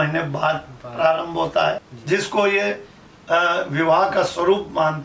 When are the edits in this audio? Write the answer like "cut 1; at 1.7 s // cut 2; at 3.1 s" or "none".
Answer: cut 1; at 1.9 s